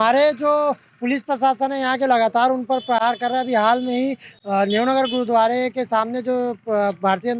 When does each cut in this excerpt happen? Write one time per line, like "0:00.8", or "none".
none